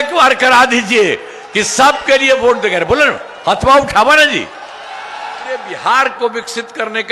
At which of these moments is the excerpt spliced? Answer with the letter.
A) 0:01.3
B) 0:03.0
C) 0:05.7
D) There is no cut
C